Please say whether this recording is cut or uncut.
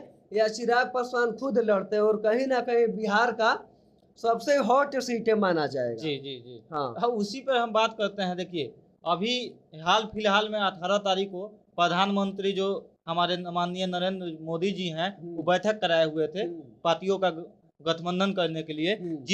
uncut